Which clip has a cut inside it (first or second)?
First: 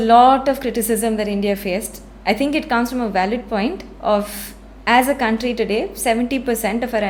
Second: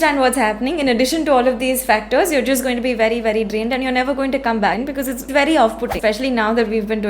second